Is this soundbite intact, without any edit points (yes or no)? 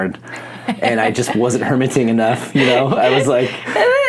yes